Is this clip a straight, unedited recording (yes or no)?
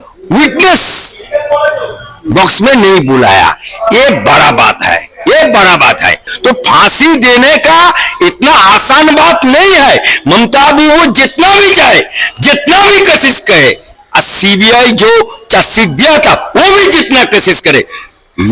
no